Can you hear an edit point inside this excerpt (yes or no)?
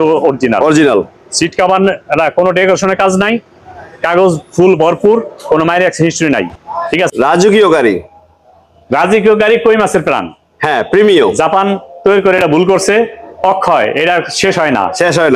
yes